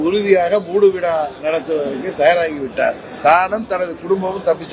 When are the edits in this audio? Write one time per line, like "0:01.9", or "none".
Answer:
0:03.1